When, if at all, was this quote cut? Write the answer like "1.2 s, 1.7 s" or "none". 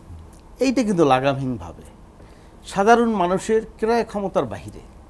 none